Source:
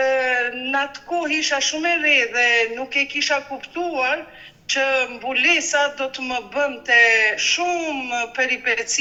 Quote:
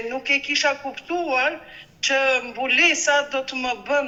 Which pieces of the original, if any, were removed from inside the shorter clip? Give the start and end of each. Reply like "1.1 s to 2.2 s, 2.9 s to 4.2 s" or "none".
none